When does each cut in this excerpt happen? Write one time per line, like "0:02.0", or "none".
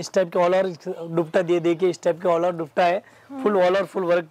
none